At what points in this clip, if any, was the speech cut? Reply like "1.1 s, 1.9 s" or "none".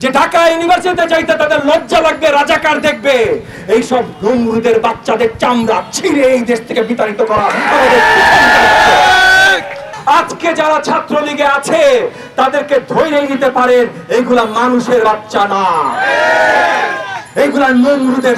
9.9 s